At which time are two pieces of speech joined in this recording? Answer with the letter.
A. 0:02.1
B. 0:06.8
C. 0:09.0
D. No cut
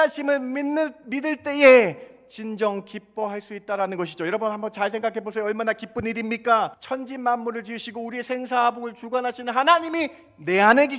B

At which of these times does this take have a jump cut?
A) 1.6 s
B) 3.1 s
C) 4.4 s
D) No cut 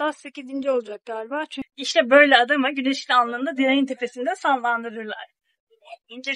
A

